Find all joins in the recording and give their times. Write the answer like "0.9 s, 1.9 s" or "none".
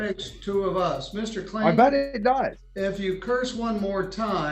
2.6 s

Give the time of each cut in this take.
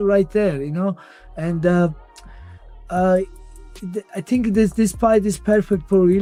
none

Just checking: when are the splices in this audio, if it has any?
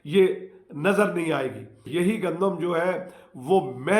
1.9 s

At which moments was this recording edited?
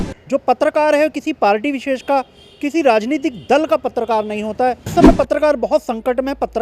4.9 s

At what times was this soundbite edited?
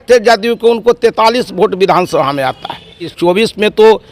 3.1 s

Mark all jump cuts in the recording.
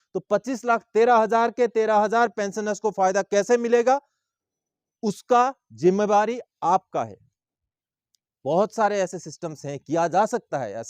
none

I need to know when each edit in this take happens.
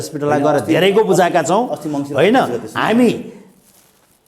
none

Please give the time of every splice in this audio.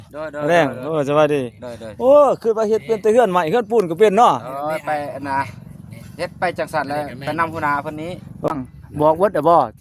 8.5 s

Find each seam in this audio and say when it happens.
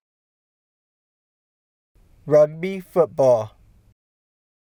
none

